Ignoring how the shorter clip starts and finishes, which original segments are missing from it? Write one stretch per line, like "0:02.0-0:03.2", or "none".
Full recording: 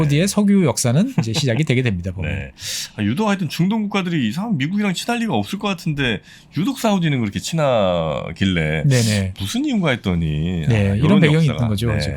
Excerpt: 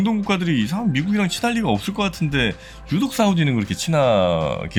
none

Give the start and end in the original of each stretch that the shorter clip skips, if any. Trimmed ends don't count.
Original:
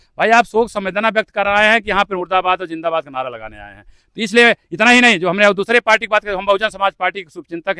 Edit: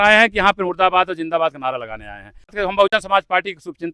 0:04.1-0:06.3

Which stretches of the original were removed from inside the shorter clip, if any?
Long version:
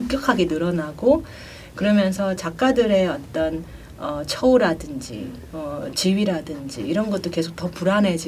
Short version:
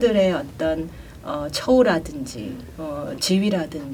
none

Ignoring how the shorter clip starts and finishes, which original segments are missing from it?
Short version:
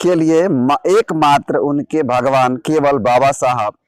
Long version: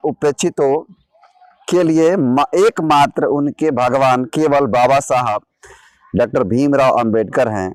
none

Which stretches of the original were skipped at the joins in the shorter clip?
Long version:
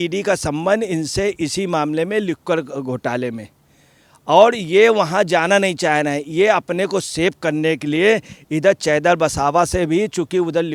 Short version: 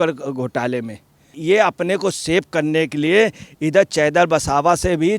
0:03.8-0:06.2

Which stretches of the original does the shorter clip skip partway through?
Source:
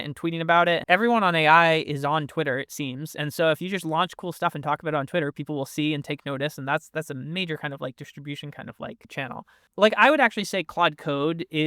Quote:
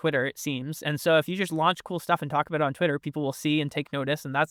none

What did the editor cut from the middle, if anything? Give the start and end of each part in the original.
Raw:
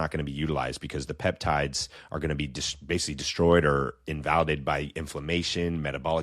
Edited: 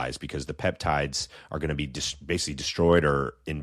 none

